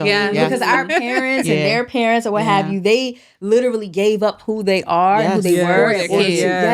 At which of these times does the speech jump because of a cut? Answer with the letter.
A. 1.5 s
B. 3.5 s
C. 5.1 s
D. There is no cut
D